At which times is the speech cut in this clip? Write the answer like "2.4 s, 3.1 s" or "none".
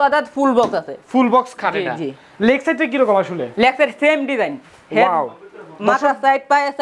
none